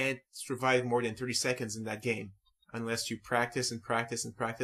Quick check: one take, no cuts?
yes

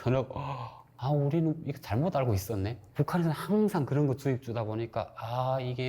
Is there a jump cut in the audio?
yes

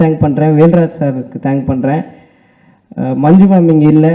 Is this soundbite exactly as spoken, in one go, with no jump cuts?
yes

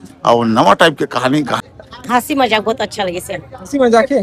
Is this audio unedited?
no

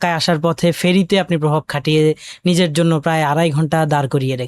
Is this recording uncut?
yes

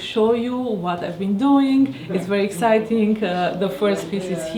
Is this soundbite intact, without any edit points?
yes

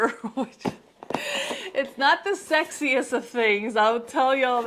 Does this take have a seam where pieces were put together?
no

